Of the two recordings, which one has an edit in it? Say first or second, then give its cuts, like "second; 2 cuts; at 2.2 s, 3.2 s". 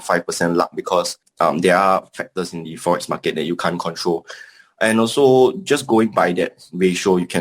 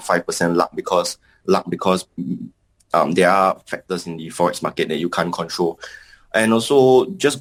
first; 1 cut; at 1.2 s